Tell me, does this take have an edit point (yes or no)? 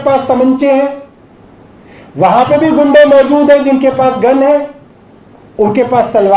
no